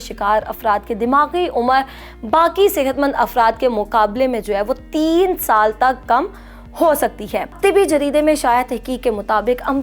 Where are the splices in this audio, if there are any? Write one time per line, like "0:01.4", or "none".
0:07.5